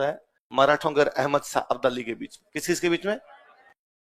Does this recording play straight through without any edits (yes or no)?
yes